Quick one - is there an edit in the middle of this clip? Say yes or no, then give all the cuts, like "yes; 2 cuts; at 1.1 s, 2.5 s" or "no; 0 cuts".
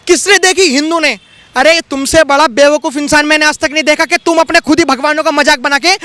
no; 0 cuts